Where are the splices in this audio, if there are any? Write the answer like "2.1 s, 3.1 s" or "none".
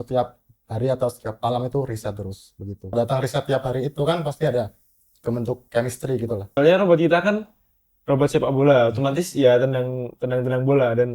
2.9 s, 6.5 s